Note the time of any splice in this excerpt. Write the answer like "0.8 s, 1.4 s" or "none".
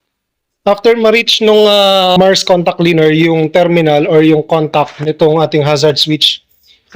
2.0 s